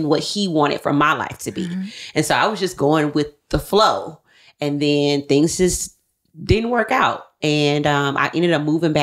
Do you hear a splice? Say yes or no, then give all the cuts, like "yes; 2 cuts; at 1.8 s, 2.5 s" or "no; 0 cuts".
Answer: no; 0 cuts